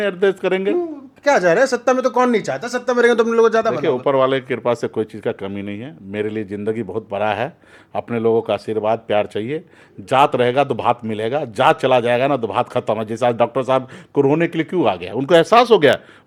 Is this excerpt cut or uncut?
uncut